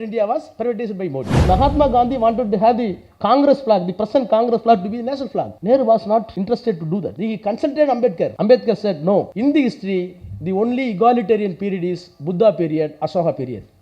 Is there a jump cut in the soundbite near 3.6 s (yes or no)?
no